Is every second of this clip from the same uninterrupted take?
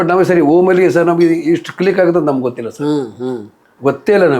yes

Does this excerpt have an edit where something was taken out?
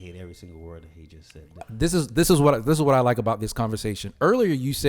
yes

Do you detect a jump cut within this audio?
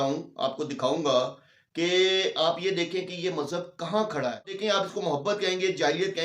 yes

